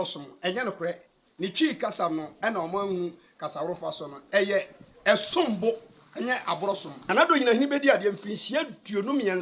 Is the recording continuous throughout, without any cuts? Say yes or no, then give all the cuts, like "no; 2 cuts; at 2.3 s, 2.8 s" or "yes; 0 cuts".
no; 1 cut; at 6.9 s